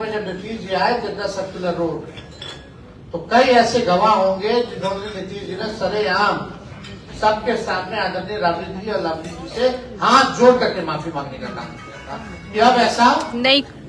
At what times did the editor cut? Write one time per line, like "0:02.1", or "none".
none